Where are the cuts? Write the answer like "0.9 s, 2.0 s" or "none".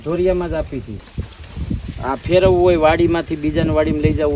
1.0 s

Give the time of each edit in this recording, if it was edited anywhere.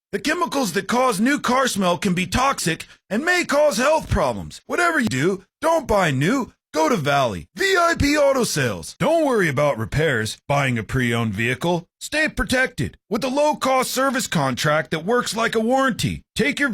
5.1 s

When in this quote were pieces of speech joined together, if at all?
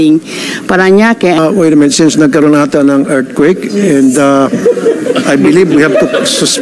1.4 s

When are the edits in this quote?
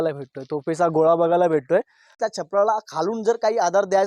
2.1 s

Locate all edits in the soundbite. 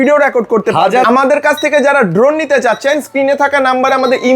1.0 s

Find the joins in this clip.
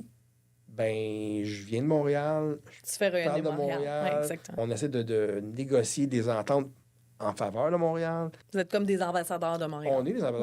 4.5 s, 8.4 s

